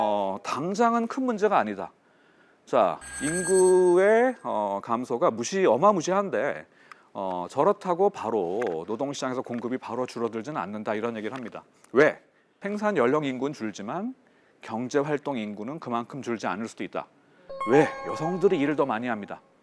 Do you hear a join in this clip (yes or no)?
no